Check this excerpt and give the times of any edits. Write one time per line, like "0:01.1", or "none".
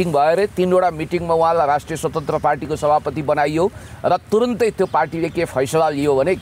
none